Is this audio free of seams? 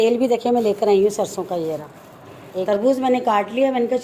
no; 1 cut; at 2.7 s

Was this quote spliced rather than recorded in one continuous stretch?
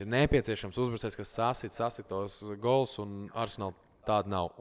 no; 0 cuts

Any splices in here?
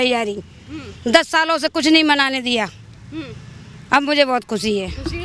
no; 0 cuts

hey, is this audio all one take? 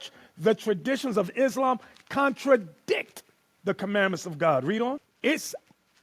no; 1 cut; at 5.1 s

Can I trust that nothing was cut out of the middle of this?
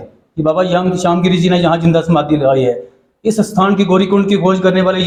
yes; 0 cuts

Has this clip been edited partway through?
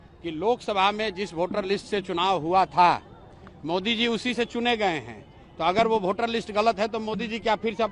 no; 0 cuts

